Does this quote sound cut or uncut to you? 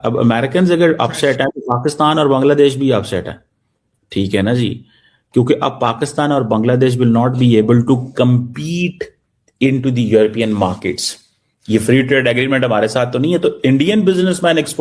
uncut